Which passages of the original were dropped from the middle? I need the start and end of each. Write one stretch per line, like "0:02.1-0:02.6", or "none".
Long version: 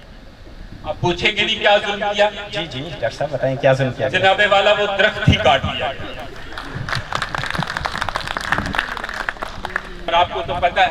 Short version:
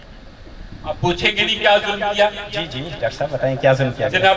none